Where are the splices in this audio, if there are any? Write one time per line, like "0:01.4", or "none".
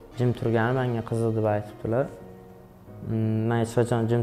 none